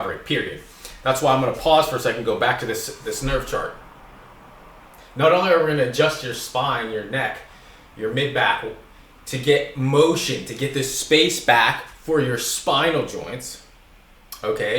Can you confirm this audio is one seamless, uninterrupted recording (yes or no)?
no